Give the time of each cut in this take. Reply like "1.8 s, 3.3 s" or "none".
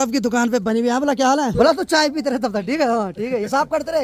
1.5 s